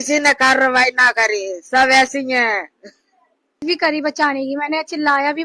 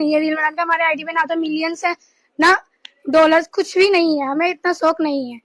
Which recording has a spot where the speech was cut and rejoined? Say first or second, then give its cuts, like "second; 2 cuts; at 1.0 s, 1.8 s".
first; 1 cut; at 3.6 s